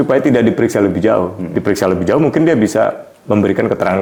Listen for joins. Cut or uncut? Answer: uncut